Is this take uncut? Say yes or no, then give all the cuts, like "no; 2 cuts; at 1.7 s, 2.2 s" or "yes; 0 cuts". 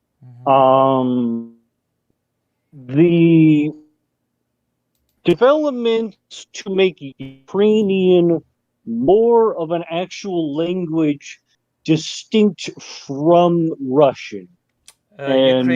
yes; 0 cuts